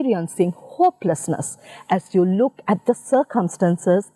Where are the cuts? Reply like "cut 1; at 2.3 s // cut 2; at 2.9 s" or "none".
none